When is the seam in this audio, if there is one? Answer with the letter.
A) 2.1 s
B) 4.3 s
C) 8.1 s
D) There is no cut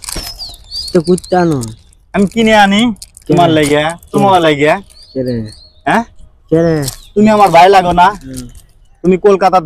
D